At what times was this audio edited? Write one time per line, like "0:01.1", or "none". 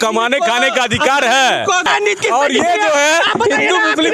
0:01.8

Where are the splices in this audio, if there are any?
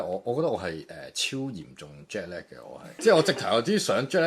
0:02.9

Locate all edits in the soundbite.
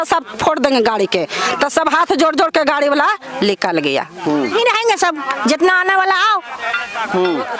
0:04.5

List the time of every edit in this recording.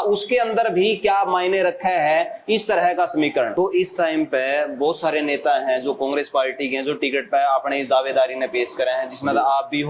0:03.5

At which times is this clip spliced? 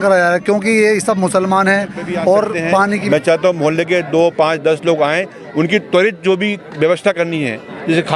0:03.0

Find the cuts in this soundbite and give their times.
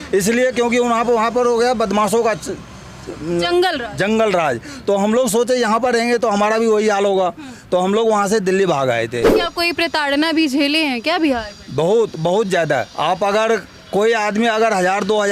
0:09.3
0:12.9

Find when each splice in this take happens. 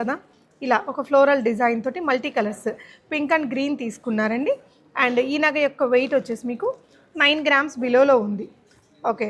none

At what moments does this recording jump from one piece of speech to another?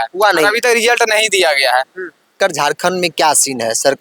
0:02.3

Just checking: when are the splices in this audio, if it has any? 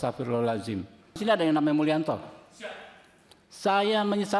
0:01.2

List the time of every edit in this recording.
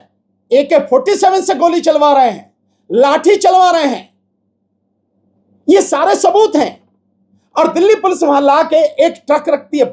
none

